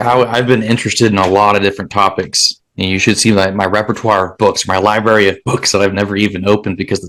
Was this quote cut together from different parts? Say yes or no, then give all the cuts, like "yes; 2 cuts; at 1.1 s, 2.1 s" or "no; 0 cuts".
no; 0 cuts